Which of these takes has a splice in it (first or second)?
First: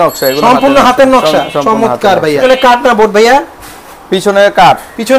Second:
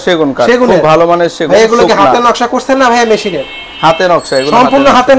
first